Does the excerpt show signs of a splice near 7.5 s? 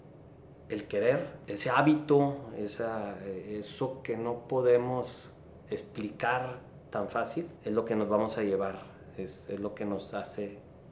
yes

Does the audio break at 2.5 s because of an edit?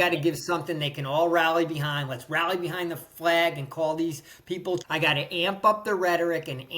no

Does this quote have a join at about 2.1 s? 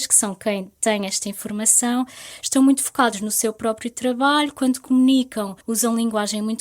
no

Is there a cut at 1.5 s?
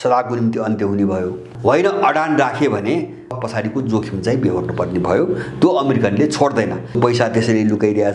yes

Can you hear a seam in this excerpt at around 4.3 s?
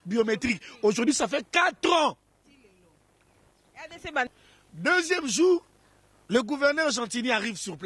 yes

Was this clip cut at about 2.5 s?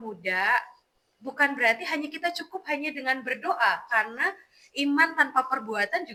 no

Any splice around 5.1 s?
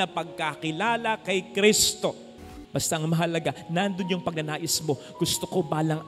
no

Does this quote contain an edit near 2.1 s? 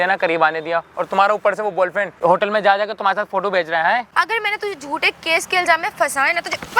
yes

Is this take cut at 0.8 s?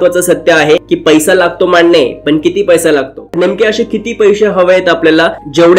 yes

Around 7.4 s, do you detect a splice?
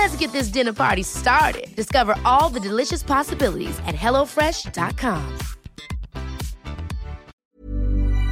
yes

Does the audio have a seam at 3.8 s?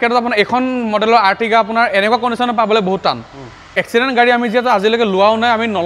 yes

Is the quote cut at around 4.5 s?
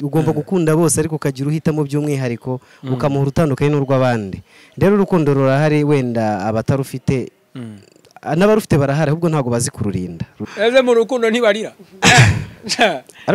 no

